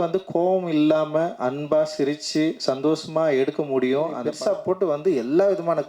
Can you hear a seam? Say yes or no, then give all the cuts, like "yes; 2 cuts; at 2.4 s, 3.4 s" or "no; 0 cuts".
yes; 1 cut; at 4.2 s